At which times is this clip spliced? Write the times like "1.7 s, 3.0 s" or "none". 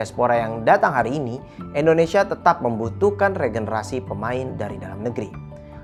none